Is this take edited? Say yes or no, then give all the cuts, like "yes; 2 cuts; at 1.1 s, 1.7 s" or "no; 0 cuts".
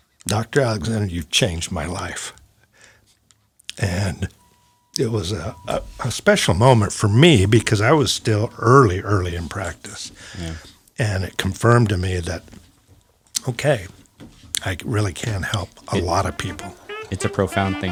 no; 0 cuts